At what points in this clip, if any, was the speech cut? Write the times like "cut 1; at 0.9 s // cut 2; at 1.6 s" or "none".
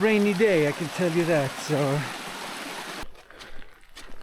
cut 1; at 3.0 s